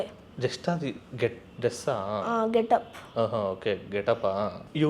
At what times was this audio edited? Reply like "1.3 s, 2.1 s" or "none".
none